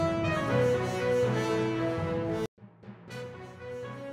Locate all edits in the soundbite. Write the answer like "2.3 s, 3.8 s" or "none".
2.3 s